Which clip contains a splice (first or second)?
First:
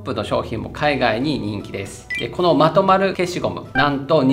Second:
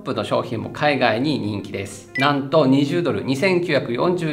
second